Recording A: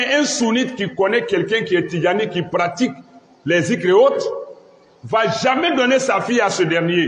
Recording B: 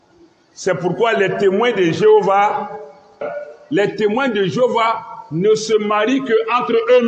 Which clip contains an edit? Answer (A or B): B